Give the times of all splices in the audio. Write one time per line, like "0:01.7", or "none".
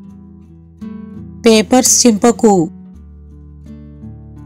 0:01.0
0:02.7